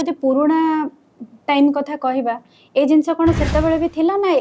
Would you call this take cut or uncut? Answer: uncut